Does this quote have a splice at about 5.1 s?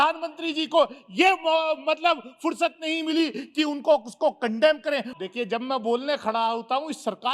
yes; 1 cut; at 5.1 s

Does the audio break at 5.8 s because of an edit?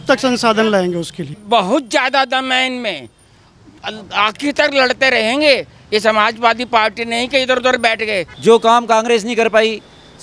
no; 2 cuts; at 1.3 s, 8.3 s

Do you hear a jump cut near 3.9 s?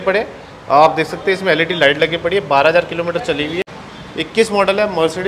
yes; 1 cut; at 3.9 s

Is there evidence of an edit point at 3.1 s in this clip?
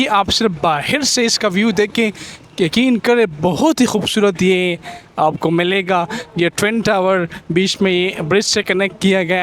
no; 0 cuts

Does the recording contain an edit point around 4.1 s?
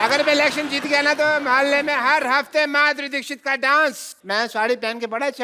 yes; 1 cut; at 4.1 s

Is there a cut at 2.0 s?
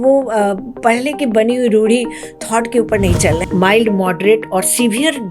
no; 1 cut; at 3.4 s

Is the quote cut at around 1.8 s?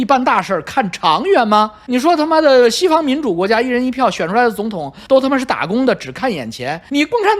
no; 0 cuts

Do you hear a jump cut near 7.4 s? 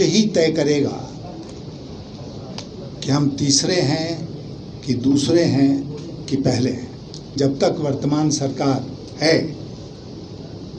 yes; 1 cut; at 7.4 s

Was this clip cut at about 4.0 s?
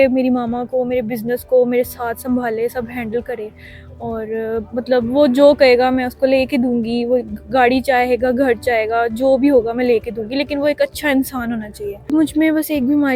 no; 1 cut; at 12.1 s

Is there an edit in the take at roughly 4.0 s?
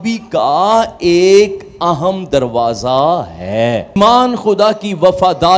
yes; 1 cut; at 4.0 s

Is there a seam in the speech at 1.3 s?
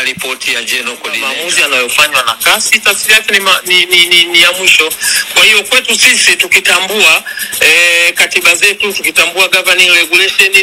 yes; 1 cut; at 1.3 s

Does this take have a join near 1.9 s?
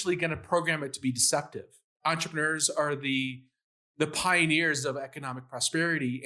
yes; 1 cut; at 1.9 s

